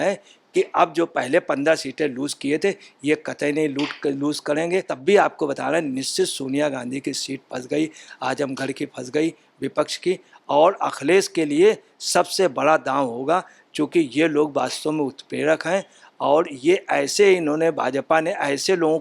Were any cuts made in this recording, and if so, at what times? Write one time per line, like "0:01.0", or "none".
0:04.9

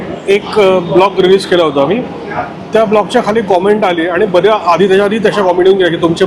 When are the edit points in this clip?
none

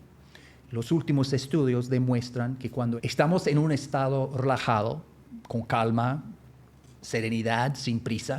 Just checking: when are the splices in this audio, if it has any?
0:03.0

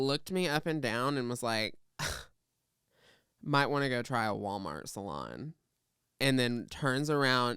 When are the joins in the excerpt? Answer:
none

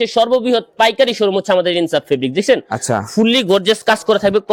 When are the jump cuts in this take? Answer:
none

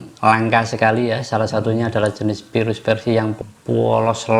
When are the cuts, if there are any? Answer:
0:03.4

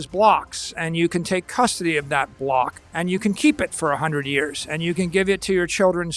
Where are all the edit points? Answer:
0:02.8

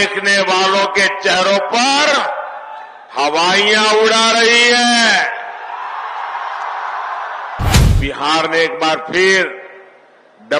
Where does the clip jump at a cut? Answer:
0:07.8

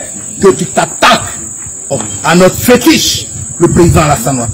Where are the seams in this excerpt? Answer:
0:02.1

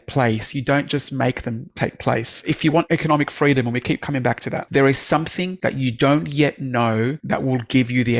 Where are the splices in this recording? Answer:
0:02.7
0:04.6
0:05.5
0:07.2

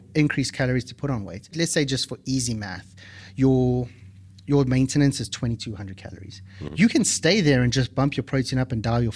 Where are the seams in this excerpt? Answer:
0:01.5

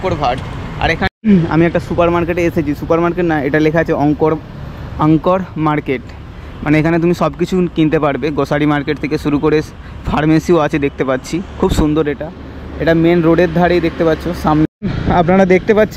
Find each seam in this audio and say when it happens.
0:01.1
0:14.7

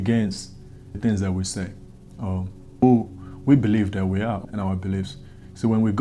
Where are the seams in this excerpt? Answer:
0:01.0
0:02.8
0:04.4

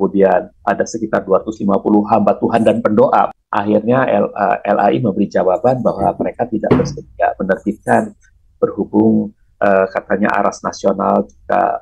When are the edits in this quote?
none

